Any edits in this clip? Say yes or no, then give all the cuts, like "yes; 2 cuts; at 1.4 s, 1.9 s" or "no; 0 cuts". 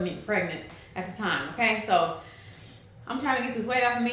no; 0 cuts